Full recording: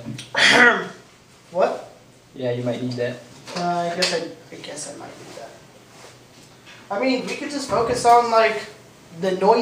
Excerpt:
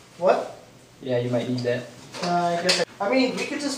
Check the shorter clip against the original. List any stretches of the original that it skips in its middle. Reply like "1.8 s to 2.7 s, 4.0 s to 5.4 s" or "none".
4.2 s to 6.8 s

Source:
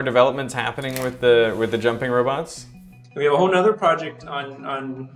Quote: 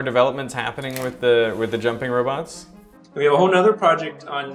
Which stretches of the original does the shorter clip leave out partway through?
none

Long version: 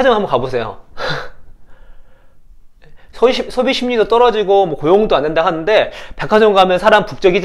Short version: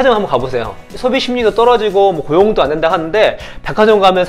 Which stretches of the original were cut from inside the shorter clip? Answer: 0.9 s to 3.5 s

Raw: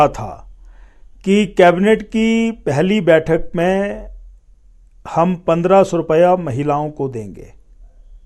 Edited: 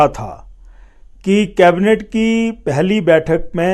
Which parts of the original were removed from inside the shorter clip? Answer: none

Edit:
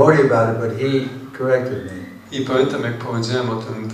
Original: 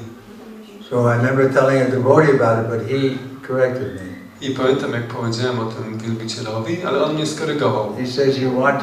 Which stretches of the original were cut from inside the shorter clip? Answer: none

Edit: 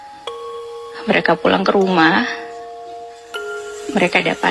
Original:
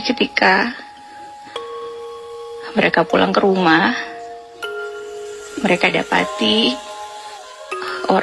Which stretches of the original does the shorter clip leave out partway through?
2.3 s to 2.7 s

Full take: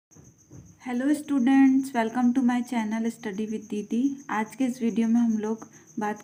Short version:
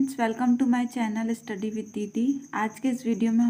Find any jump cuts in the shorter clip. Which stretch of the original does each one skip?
none

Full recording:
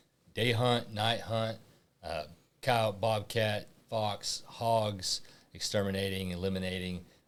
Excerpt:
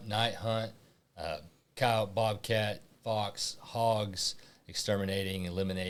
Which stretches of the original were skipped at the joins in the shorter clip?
none

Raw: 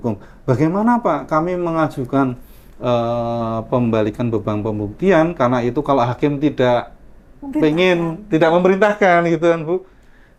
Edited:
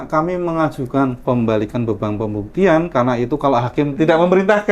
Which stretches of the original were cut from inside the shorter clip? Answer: 2.4 s to 3.6 s, 6.4 s to 8.2 s

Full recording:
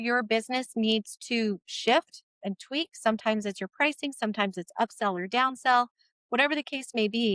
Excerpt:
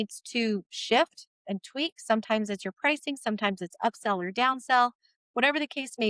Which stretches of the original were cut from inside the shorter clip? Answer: none

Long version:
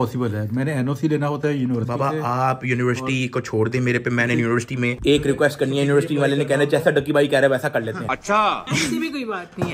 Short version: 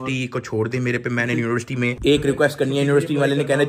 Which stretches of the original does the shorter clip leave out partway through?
none

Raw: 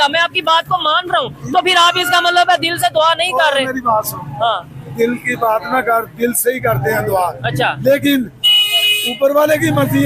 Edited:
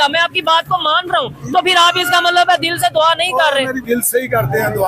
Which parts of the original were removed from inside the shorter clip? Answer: 3.8 s to 6.1 s

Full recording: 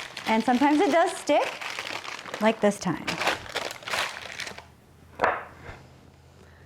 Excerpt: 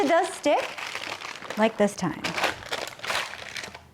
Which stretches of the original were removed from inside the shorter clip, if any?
none

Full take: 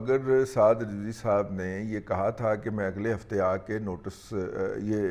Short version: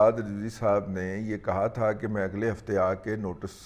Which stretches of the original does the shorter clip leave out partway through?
none

